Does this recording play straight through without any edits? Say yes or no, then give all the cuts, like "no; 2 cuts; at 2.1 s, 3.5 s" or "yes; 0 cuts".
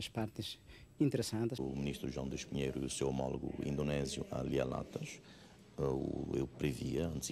no; 1 cut; at 1.6 s